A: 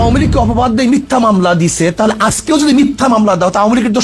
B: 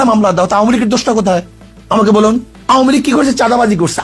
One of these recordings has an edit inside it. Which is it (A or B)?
B